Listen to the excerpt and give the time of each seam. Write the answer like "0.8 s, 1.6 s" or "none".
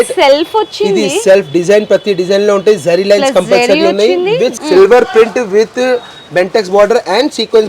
4.6 s